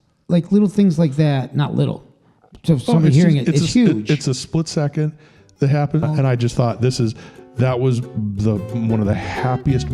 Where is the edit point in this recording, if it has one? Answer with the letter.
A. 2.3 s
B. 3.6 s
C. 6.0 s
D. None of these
C